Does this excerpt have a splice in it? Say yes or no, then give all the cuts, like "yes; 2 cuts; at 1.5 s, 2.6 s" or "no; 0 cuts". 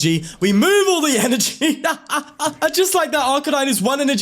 yes; 1 cut; at 2.6 s